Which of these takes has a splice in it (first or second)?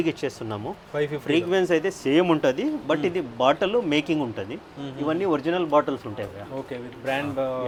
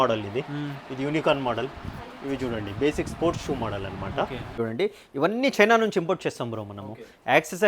second